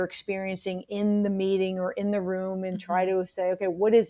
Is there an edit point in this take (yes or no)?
no